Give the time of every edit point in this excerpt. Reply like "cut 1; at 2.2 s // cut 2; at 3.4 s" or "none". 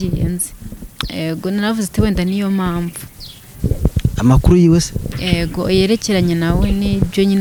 none

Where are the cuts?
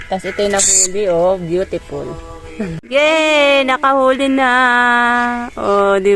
cut 1; at 2.8 s

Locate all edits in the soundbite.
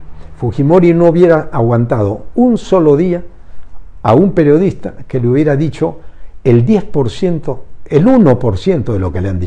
none

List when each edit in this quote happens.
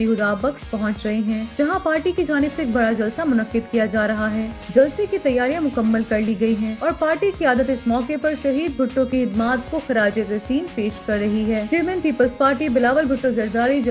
none

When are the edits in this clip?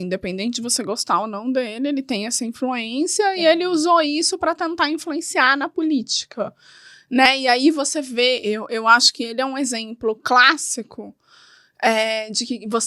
none

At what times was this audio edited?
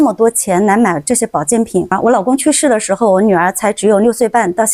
cut 1; at 1.9 s

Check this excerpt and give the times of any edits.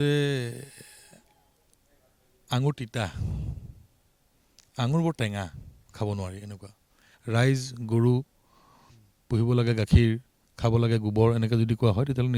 cut 1; at 7.1 s

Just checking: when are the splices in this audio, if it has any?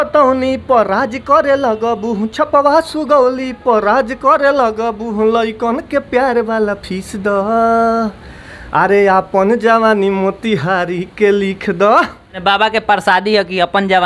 cut 1; at 12.2 s

